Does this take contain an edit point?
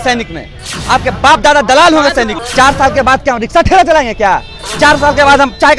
yes; 1 cut; at 2.4 s

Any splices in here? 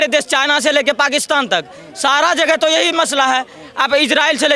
no; 0 cuts

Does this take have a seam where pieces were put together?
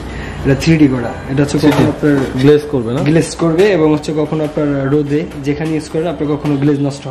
no; 0 cuts

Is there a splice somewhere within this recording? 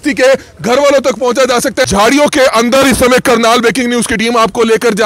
yes; 1 cut; at 1.9 s

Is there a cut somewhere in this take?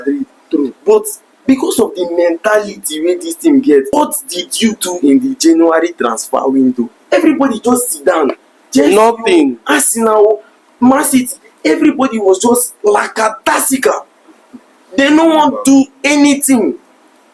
yes; 2 cuts; at 3.9 s, 7.0 s

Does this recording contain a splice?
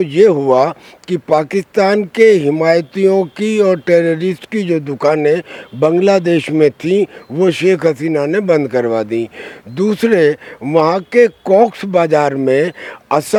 no; 0 cuts

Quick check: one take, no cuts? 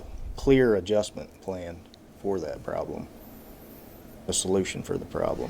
no; 1 cut; at 4.4 s

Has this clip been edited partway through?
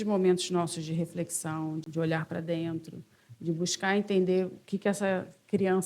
yes; 1 cut; at 1.9 s

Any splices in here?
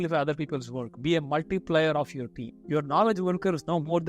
yes; 1 cut; at 2.0 s

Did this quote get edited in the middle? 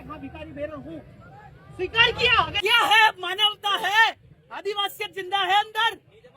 yes; 1 cut; at 2.5 s

